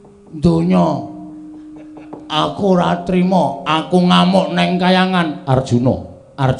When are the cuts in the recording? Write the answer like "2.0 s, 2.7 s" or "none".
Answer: none